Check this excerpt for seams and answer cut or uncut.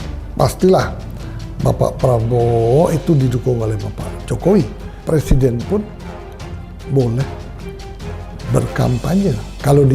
cut